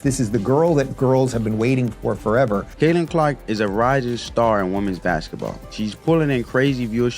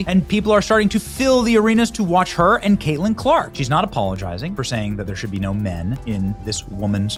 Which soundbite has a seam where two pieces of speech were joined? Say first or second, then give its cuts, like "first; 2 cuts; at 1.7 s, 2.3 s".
first; 2 cuts; at 2.7 s, 5.6 s